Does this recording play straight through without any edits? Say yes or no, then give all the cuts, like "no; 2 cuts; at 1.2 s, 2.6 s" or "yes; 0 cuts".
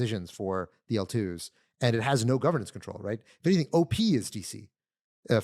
yes; 0 cuts